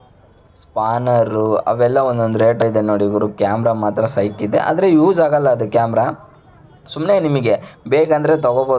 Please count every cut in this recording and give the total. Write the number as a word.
one